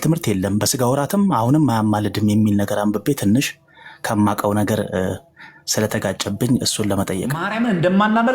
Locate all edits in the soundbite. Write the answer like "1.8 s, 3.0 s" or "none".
7.4 s